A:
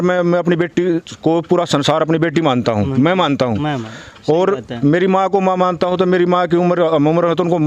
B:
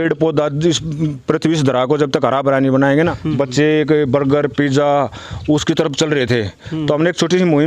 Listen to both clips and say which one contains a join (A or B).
B